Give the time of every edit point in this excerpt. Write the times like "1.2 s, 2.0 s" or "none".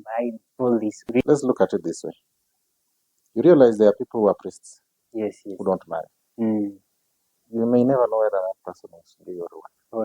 1.0 s